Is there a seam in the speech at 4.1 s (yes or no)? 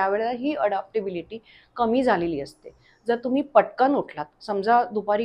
no